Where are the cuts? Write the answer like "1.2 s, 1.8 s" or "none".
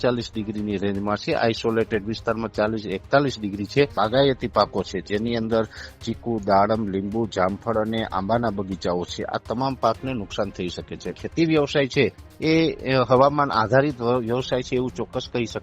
3.9 s, 11.2 s